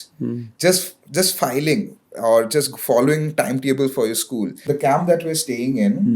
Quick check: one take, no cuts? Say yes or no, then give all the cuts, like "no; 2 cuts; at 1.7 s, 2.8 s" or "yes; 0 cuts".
no; 1 cut; at 4.5 s